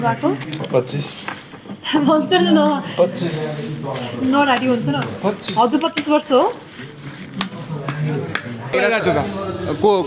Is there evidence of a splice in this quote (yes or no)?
yes